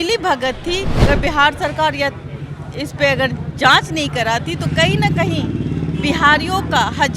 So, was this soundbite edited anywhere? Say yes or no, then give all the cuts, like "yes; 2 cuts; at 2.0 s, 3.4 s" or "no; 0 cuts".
yes; 1 cut; at 1.0 s